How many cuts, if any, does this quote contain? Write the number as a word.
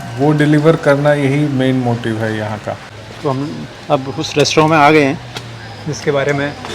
one